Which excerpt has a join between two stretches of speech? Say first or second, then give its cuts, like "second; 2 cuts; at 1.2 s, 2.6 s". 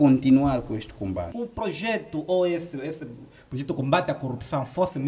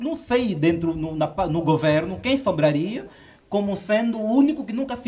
first; 1 cut; at 1.4 s